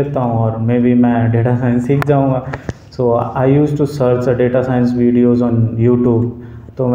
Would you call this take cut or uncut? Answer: uncut